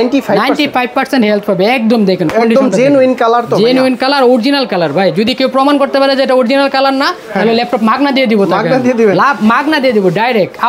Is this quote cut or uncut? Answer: uncut